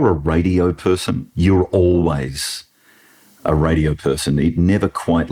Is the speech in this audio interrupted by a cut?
no; 0 cuts

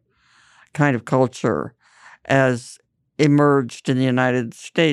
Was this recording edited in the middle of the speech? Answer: no; 0 cuts

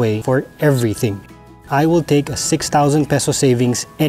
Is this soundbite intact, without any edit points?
no; 1 cut; at 1.5 s

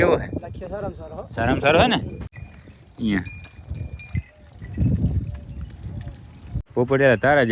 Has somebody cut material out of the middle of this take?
yes; 2 cuts; at 2.4 s, 6.6 s

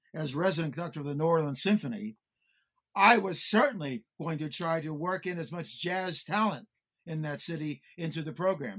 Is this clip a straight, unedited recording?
yes; 0 cuts

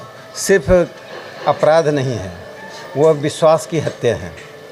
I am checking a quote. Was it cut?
no; 0 cuts

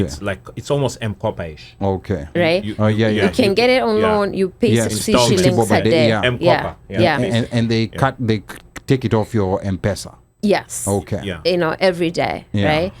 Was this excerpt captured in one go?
yes; 0 cuts

